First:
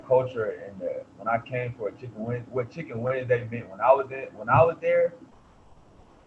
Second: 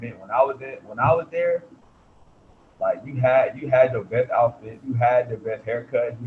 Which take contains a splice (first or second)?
second